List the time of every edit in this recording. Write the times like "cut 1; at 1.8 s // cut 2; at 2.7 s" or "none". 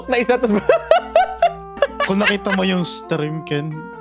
cut 1; at 1.7 s